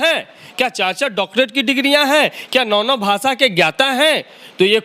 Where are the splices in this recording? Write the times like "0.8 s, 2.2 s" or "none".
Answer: none